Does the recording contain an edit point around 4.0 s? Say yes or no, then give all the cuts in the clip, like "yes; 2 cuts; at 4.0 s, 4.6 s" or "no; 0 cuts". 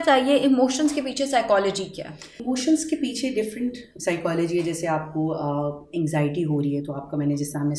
no; 1 cut; at 2.3 s